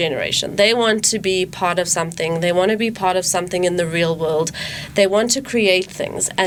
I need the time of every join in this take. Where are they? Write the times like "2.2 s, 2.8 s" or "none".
none